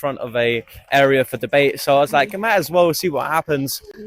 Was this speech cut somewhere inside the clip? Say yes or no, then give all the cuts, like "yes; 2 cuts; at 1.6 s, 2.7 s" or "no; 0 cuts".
no; 0 cuts